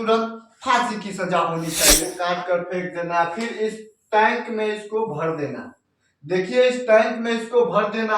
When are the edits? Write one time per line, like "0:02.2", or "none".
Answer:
0:02.1